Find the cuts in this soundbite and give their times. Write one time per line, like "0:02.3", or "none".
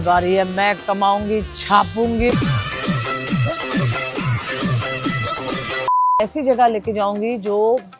0:02.3
0:06.2